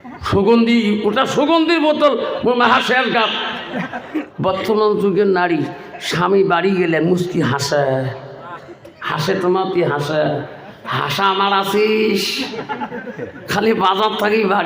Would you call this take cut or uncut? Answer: cut